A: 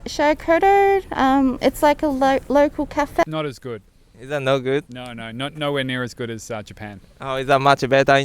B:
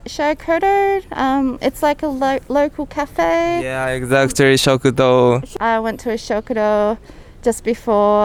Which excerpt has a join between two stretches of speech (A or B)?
A